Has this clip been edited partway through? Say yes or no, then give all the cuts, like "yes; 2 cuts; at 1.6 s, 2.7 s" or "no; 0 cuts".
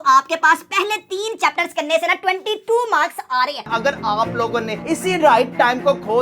yes; 1 cut; at 3.7 s